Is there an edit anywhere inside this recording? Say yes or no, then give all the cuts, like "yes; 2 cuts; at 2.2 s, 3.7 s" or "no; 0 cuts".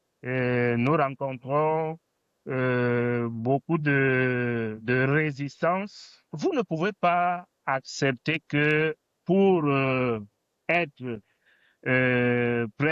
yes; 1 cut; at 6.3 s